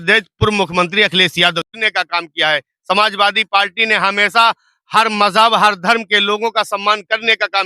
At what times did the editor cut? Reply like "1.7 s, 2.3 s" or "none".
1.7 s